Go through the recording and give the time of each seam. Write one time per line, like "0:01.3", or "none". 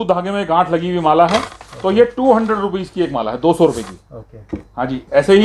none